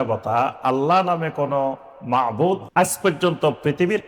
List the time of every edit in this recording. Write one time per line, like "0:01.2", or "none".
0:02.7